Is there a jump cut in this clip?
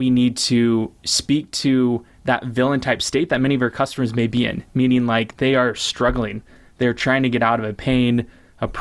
no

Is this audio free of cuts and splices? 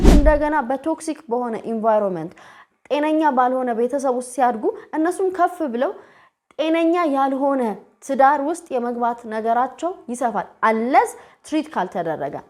yes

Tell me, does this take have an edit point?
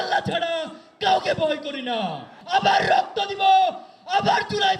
yes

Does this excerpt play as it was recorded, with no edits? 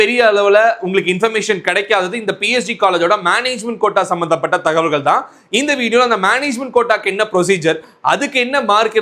yes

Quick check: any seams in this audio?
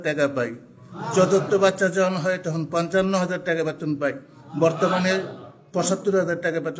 no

